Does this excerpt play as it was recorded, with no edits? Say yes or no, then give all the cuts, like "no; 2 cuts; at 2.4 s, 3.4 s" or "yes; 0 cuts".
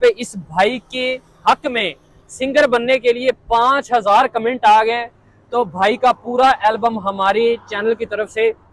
yes; 0 cuts